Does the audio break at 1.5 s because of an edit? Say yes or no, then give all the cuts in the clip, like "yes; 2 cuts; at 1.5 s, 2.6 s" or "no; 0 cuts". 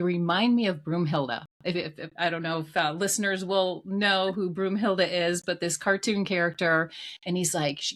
no; 0 cuts